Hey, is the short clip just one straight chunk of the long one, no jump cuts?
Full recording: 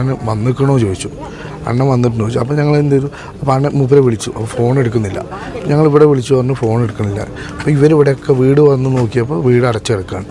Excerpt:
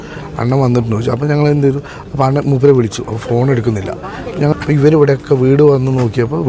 no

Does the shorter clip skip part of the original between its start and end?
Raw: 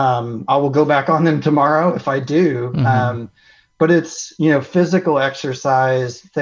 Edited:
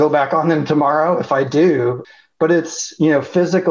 yes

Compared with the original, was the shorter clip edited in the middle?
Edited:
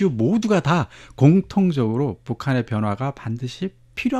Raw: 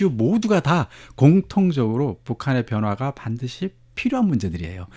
no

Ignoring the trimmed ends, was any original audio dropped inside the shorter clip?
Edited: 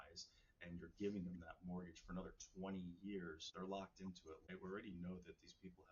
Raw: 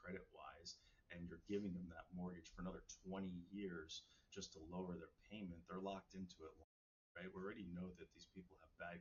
yes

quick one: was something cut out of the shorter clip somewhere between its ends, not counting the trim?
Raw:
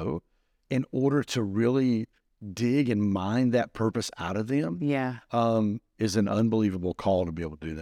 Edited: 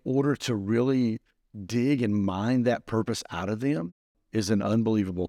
yes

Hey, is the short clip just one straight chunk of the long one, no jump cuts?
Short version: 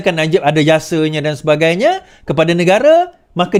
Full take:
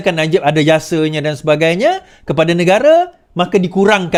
yes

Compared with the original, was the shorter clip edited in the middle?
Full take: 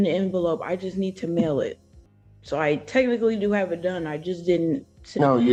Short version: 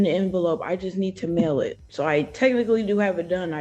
yes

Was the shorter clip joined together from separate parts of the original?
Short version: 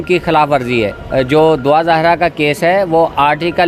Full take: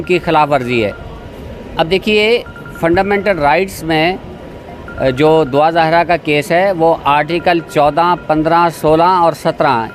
yes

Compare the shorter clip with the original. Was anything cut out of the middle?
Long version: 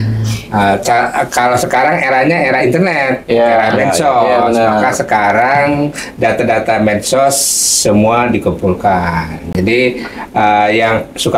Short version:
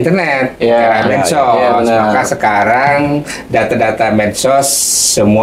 no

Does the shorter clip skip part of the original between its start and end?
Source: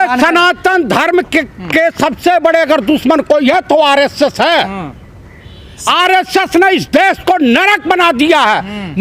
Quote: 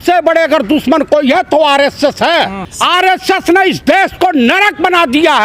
yes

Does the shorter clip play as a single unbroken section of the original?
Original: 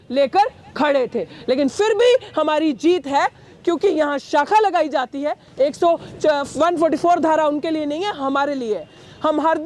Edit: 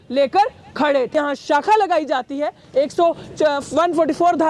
no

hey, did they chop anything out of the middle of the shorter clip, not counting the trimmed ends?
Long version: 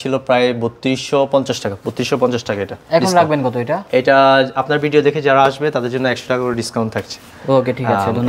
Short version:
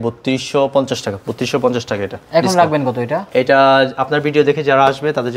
no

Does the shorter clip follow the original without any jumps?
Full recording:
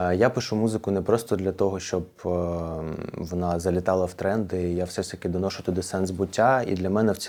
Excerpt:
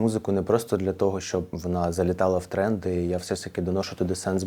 no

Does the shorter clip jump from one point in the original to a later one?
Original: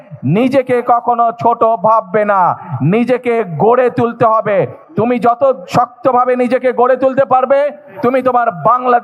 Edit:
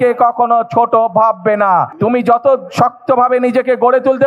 yes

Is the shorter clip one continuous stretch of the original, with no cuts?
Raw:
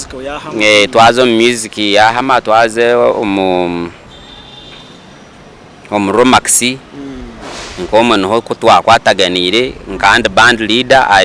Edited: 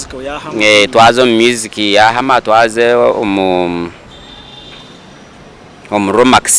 yes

